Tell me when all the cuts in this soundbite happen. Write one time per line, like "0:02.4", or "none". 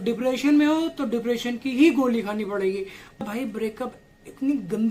0:03.3